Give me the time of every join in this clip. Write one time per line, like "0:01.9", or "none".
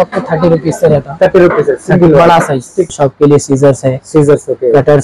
0:02.9